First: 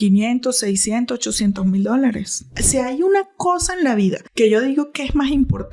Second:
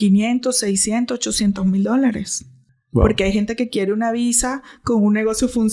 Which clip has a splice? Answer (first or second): first